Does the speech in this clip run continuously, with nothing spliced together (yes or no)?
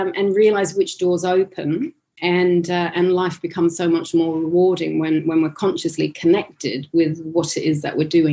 yes